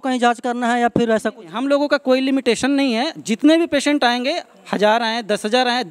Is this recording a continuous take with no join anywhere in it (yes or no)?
yes